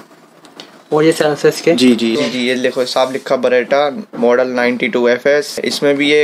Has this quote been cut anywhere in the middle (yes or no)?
yes